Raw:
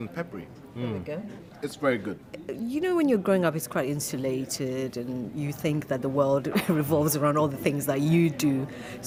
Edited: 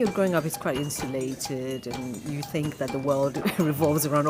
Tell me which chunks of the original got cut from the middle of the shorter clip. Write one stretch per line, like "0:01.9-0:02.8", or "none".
none

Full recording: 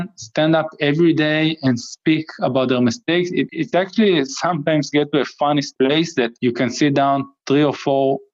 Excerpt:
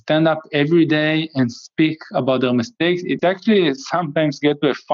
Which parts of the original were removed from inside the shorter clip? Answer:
0:03.5-0:03.7

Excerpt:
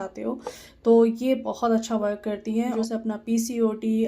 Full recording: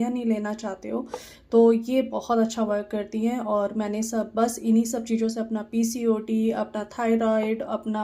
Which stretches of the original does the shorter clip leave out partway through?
0:03.4-0:05.2

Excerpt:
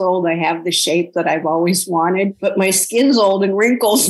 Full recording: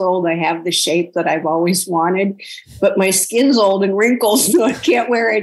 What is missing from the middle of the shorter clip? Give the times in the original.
0:02.4-0:02.8

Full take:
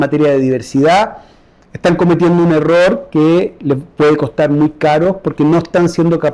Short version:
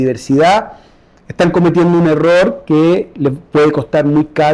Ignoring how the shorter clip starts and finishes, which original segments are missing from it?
none

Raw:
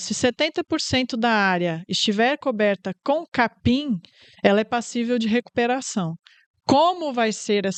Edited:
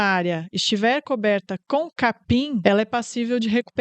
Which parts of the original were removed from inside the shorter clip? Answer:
0:04.0-0:04.4

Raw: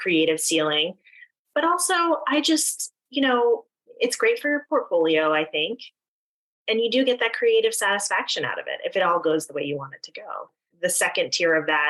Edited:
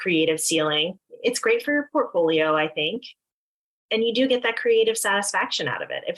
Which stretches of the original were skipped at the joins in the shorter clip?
0:01.0-0:03.8

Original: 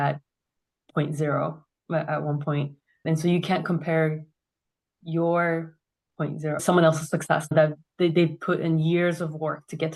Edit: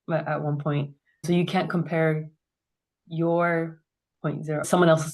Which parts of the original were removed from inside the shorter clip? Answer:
0:03.0-0:03.2

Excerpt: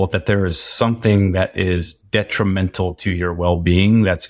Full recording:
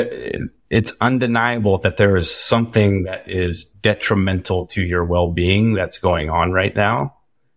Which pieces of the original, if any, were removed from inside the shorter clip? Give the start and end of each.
none

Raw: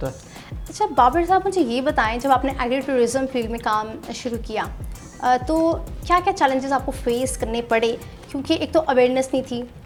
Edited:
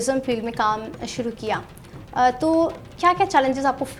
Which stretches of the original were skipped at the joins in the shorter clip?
none

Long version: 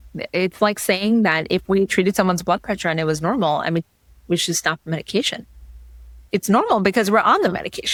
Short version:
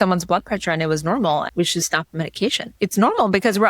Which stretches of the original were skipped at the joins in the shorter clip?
0:03.6-0:04.2
0:05.4-0:06.2

